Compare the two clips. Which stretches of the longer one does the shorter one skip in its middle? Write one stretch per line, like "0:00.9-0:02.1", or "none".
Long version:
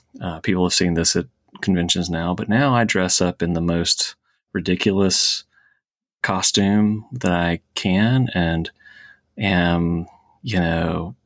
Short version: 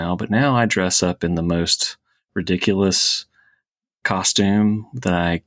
none